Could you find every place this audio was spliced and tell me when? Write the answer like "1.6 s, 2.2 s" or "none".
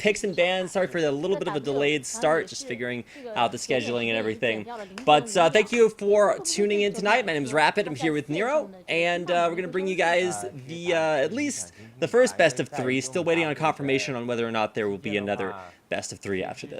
2.7 s